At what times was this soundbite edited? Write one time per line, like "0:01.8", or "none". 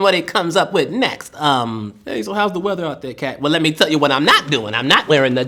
none